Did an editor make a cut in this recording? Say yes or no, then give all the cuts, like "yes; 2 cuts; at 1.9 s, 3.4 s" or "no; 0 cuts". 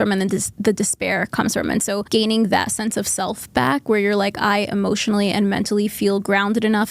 yes; 1 cut; at 2.0 s